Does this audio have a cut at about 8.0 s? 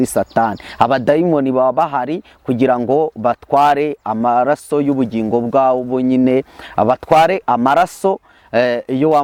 no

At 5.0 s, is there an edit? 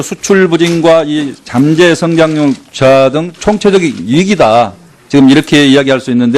yes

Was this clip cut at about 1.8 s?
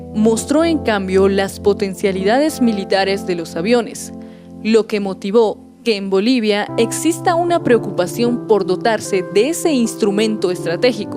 yes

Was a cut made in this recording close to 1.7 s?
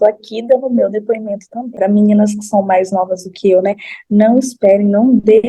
yes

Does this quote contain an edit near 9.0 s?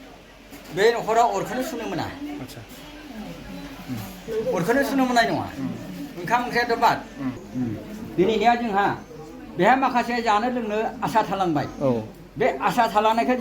no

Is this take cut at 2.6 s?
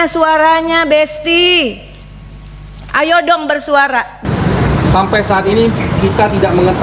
no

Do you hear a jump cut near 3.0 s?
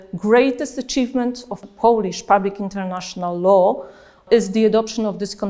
no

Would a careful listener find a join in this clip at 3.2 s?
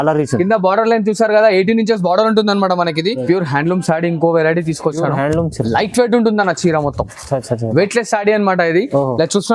yes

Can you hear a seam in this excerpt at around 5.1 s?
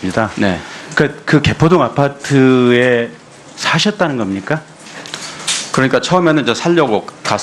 no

